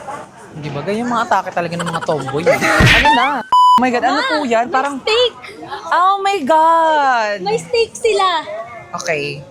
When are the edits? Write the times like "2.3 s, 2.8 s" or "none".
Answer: none

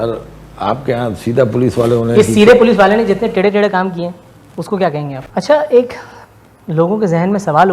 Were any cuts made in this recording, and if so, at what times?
5.2 s

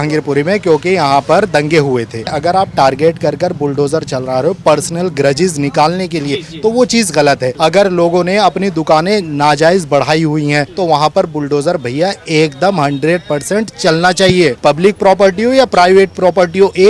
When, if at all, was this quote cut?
2.3 s, 7.5 s, 10.7 s, 14.6 s

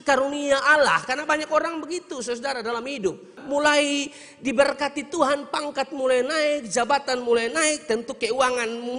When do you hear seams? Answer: 3.4 s

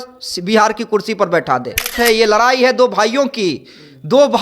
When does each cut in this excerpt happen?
1.9 s

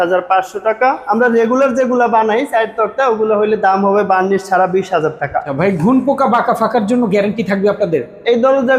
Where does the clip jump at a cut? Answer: 1.0 s, 5.5 s

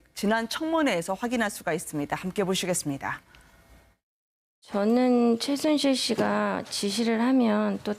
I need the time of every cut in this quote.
6.2 s

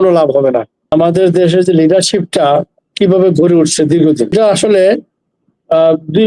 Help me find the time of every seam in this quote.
0.9 s, 4.3 s

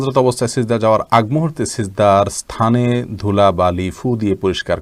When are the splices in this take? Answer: none

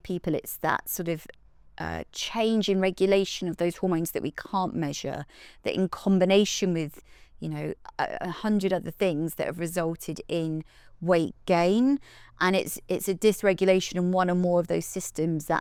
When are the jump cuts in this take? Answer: none

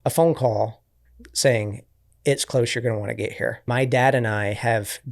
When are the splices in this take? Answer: 3.7 s

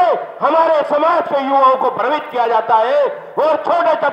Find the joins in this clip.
none

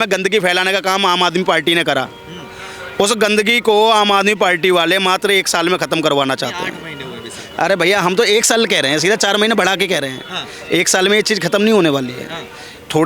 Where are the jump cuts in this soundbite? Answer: none

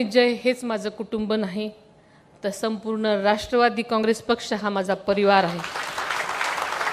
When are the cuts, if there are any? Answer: none

